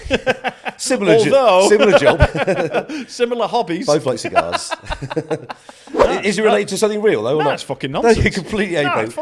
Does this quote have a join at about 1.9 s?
no; 1 cut; at 5.9 s

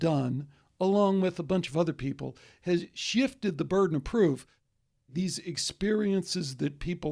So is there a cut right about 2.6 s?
no; 1 cut; at 4.9 s

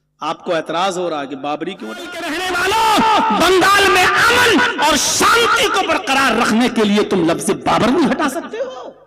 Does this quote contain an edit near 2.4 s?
yes; 1 cut; at 2.4 s

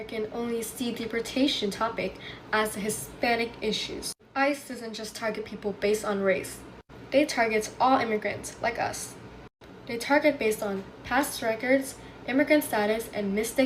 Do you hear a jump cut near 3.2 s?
no; 0 cuts

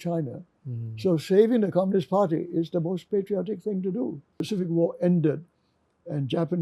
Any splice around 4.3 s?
yes; 1 cut; at 4.3 s

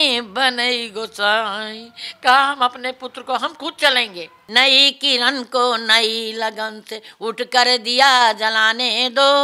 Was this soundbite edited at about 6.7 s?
no; 1 cut; at 4.4 s

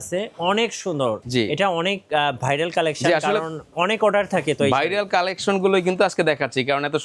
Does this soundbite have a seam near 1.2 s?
yes; 1 cut; at 1.2 s

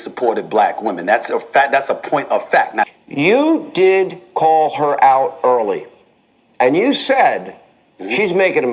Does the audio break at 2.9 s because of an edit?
yes; 1 cut; at 2.9 s

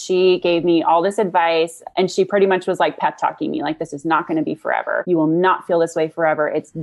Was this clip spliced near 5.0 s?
yes; 1 cut; at 5.0 s

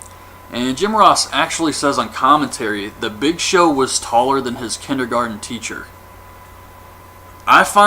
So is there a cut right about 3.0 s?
no; 1 cut; at 6.8 s

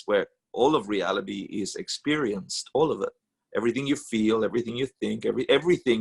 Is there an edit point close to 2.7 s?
no; 0 cuts

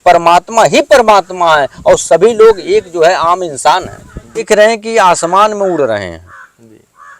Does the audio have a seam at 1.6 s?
no; 1 cut; at 4.4 s

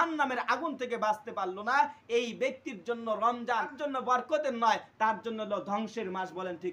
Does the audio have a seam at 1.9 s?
no; 1 cut; at 3.7 s

